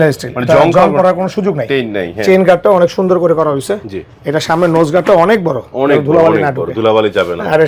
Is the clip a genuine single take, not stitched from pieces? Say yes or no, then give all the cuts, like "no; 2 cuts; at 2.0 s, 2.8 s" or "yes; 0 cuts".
yes; 0 cuts